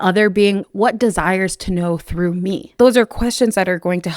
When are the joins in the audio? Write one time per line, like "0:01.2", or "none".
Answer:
0:02.8

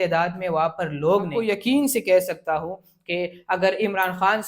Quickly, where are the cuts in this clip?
0:01.4

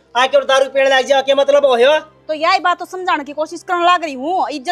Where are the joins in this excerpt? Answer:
none

